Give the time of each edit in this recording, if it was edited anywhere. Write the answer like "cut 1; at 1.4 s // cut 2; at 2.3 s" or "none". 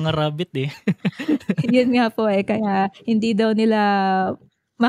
none

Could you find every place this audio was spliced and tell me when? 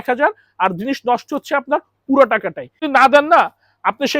cut 1; at 2.8 s

